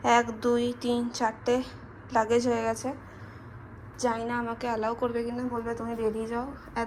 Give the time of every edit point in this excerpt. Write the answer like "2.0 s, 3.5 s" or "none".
none